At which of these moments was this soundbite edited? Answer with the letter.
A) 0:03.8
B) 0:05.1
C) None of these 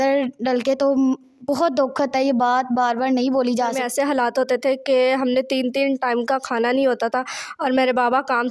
A